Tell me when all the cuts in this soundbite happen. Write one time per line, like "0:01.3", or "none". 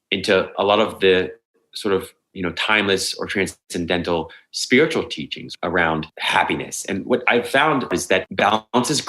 0:05.4
0:06.1
0:07.9